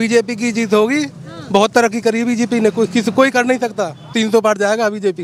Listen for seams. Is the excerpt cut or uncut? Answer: cut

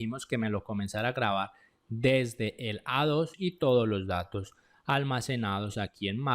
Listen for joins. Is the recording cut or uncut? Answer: cut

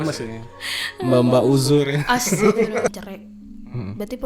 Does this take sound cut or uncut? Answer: cut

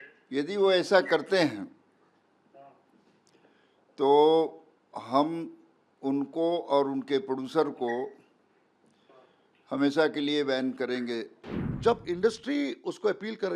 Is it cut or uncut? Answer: cut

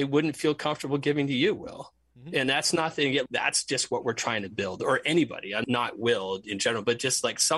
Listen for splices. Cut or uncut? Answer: cut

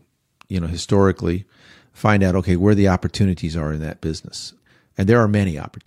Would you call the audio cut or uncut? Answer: cut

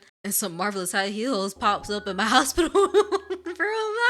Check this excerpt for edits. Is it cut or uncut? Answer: uncut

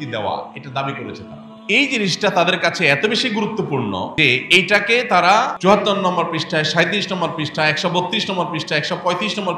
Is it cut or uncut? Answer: cut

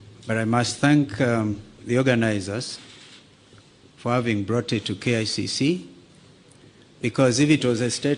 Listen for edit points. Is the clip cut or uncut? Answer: uncut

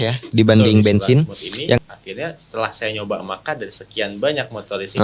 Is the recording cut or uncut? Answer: cut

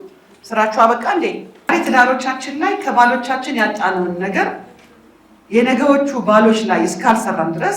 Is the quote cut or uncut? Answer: cut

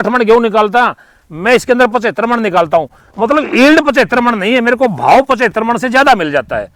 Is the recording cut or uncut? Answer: uncut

